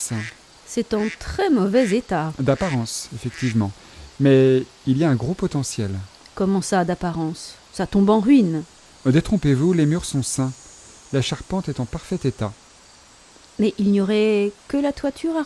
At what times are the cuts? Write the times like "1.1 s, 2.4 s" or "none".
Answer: none